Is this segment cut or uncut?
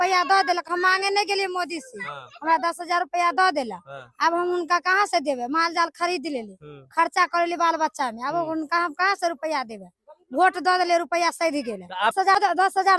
uncut